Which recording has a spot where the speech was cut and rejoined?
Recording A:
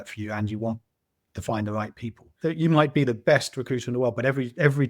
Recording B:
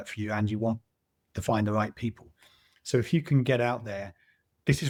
A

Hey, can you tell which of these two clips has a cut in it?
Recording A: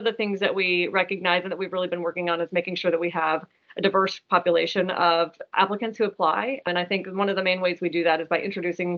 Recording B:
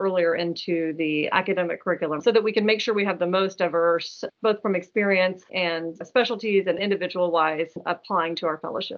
B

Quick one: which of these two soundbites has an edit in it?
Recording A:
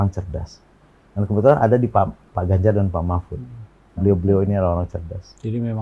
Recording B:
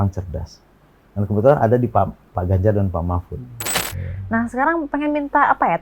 B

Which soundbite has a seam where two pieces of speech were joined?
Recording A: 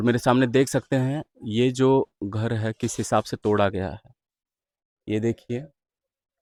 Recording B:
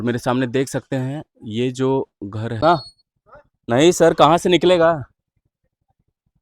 B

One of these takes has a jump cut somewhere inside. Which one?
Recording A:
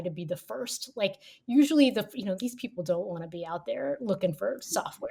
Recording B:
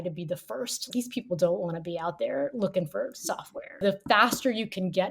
B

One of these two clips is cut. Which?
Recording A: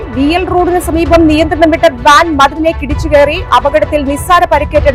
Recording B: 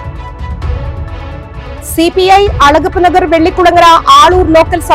B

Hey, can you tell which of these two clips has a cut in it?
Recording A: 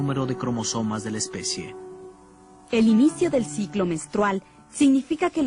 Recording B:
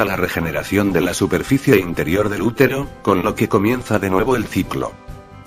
A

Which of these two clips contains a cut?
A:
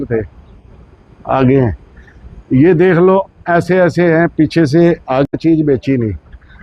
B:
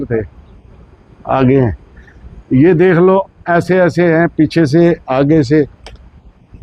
A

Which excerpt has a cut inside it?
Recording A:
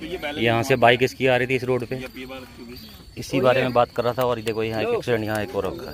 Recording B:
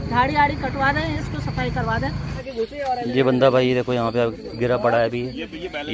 B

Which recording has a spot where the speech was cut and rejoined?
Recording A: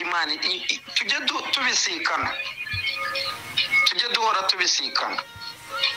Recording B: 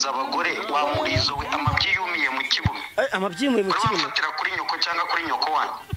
A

